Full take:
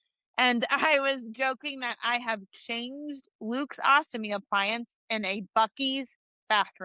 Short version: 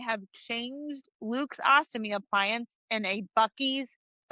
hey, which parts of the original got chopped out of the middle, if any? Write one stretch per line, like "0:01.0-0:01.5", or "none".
none